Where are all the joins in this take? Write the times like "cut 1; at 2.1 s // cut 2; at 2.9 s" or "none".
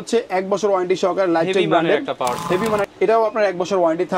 cut 1; at 2.9 s